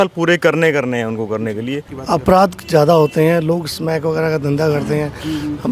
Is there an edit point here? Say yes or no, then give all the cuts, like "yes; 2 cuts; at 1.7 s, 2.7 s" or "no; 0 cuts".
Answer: yes; 1 cut; at 1.9 s